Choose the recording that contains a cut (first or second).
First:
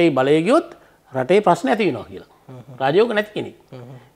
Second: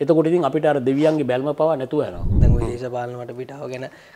second